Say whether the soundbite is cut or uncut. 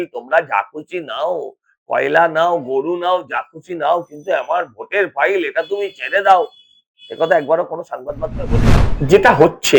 cut